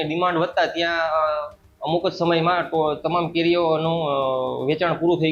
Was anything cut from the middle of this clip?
no; 0 cuts

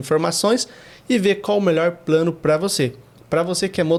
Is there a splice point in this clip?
no; 0 cuts

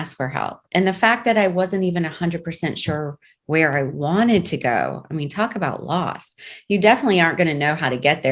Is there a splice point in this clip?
no; 0 cuts

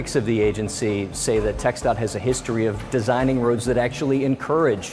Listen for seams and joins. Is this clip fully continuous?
yes; 0 cuts

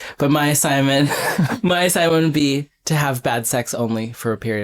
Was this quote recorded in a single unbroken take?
no; 1 cut; at 1.5 s

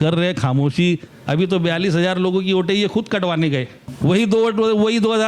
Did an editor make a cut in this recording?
yes; 2 cuts; at 1.1 s, 3.8 s

